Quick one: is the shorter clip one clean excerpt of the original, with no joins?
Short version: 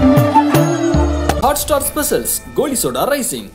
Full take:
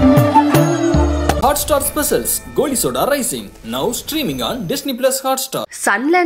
yes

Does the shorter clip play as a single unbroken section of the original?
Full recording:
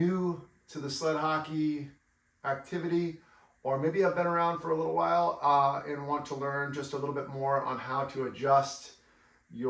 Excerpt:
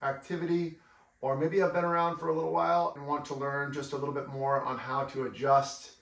no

